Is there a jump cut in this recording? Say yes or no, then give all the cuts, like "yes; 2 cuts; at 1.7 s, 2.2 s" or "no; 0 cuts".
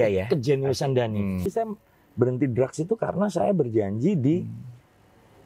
yes; 1 cut; at 1.5 s